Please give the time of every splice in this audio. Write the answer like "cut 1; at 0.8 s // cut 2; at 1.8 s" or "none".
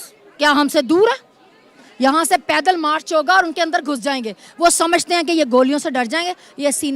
none

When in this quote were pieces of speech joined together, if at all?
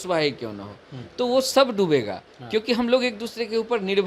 none

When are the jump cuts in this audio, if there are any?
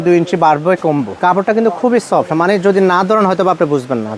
cut 1; at 1.2 s

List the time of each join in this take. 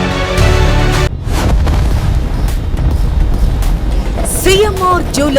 cut 1; at 1.1 s

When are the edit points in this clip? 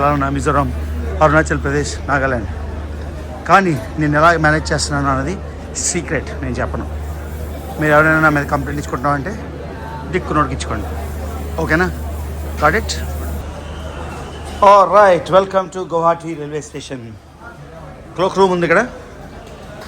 cut 1; at 13.4 s

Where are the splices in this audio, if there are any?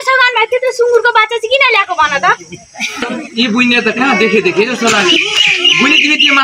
cut 1; at 3.0 s

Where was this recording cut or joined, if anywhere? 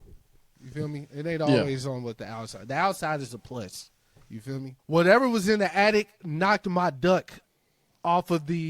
cut 1; at 4.7 s

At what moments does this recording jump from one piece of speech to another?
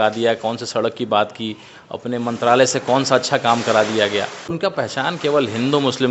cut 1; at 4.6 s

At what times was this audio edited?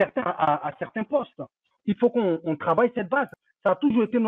cut 1; at 1.7 s // cut 2; at 3.3 s

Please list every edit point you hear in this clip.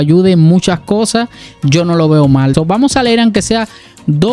cut 1; at 2.5 s

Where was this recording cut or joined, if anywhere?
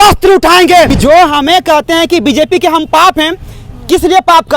cut 1; at 0.9 s

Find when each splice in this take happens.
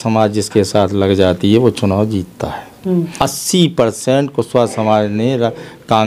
cut 1; at 3.1 s

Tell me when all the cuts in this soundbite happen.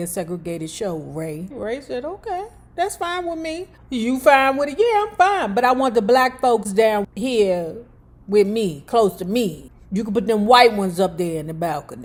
none

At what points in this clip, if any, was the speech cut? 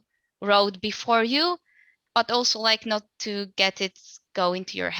cut 1; at 2.0 s

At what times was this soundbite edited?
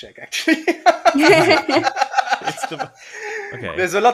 none

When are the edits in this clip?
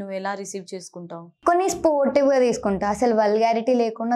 cut 1; at 1.3 s

